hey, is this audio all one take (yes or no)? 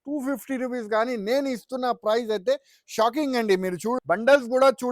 no